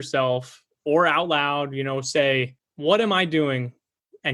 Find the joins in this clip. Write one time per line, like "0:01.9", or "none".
0:02.6

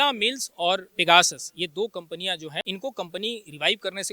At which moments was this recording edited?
0:00.9
0:02.6

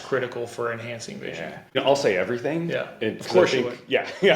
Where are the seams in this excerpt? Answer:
0:01.8

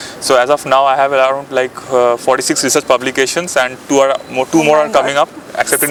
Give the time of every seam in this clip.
none

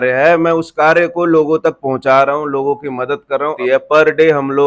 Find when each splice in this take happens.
0:03.6

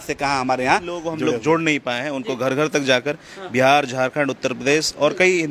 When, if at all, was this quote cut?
0:01.1

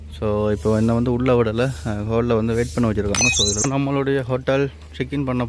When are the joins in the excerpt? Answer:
0:03.6

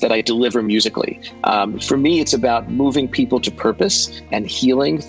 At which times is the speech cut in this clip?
none

